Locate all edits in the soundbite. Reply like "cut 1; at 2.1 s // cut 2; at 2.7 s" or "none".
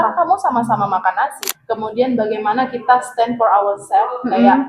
cut 1; at 1.6 s